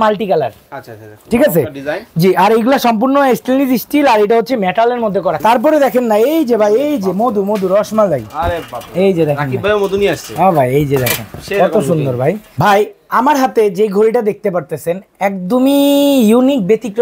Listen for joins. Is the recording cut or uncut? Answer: cut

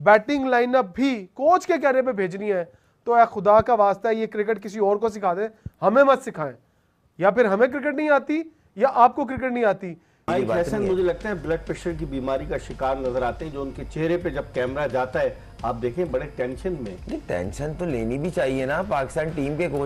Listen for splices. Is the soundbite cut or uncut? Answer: cut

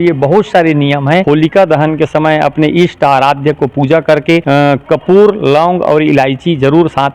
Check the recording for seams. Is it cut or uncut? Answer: cut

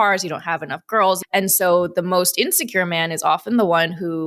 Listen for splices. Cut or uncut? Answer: cut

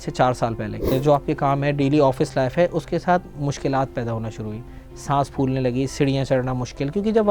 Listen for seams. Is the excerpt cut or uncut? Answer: cut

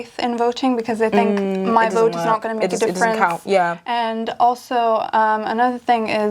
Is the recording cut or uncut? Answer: uncut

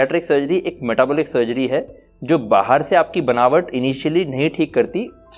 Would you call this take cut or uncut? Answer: uncut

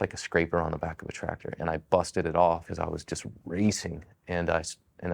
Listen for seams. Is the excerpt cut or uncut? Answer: uncut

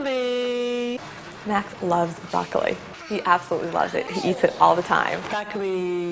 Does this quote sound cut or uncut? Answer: cut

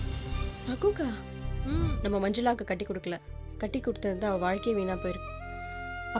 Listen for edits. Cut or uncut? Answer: cut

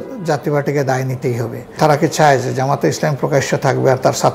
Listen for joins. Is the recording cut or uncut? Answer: cut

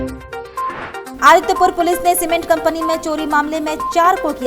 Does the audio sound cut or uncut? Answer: cut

